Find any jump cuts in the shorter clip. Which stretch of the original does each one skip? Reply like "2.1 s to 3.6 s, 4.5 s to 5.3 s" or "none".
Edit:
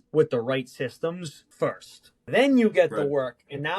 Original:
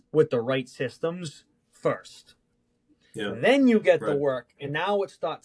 1.4 s to 1.6 s, 2.5 s to 3.4 s